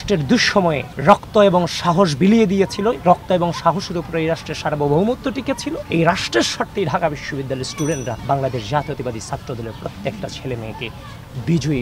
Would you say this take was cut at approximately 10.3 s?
no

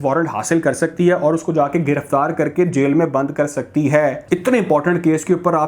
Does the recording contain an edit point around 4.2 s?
yes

